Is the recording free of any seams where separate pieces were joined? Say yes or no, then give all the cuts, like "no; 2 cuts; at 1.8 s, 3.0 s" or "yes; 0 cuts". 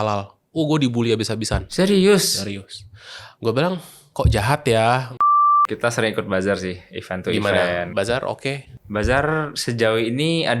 no; 1 cut; at 5.5 s